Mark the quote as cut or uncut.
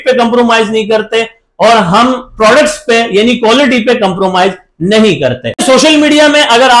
cut